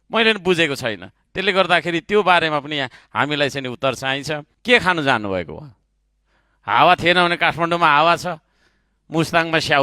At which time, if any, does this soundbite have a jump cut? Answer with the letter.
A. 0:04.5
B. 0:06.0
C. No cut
A